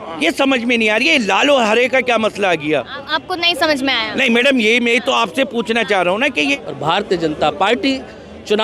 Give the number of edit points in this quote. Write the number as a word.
one